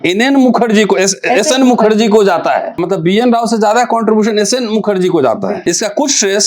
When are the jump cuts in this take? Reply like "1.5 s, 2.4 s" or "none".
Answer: 2.8 s, 5.6 s

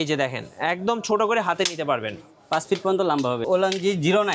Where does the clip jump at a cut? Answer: 3.4 s

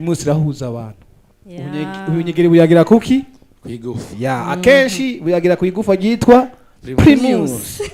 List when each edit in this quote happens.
none

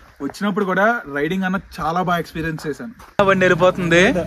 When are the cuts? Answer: 3.0 s

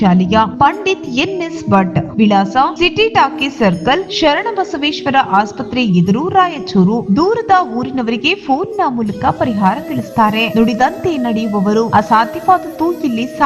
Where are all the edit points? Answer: none

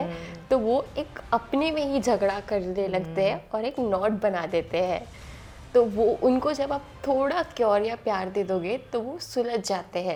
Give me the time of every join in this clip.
none

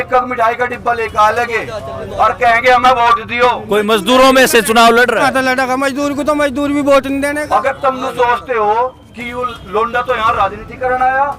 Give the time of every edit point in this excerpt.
3.6 s, 5.3 s, 7.4 s

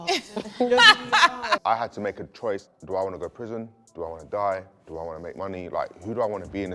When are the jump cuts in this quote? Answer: 1.6 s, 2.7 s

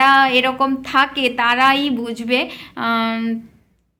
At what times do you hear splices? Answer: none

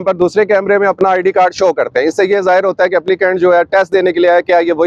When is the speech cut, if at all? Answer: none

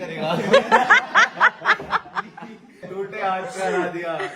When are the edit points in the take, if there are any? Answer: 2.7 s

